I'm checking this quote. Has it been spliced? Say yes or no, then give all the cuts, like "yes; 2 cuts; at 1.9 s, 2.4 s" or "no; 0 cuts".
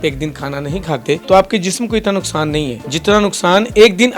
yes; 2 cuts; at 1.2 s, 2.8 s